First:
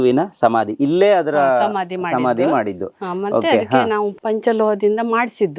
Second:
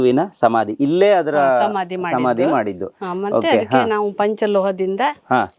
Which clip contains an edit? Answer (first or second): first